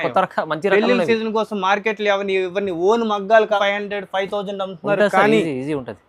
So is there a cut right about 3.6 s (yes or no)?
yes